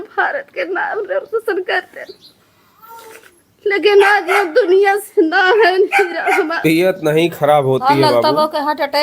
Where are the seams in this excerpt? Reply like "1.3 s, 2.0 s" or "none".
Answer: 6.6 s